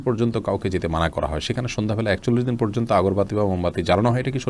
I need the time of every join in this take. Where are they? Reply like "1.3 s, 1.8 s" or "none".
none